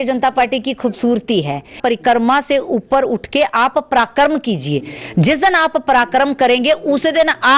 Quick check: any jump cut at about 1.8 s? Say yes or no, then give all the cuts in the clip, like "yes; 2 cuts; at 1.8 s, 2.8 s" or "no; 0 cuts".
yes; 1 cut; at 1.8 s